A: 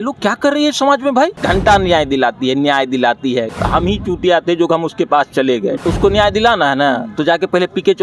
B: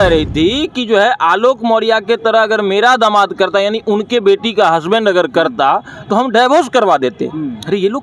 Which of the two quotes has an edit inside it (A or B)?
A